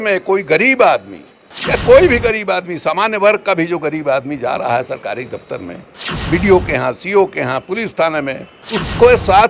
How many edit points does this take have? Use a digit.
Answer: 2